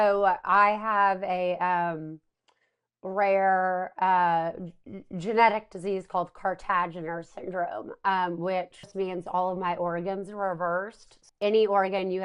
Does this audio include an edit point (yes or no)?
yes